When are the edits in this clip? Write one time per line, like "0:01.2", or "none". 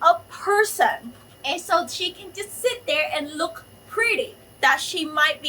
0:04.4